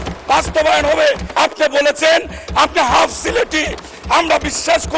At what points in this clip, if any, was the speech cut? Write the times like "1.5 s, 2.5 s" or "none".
1.3 s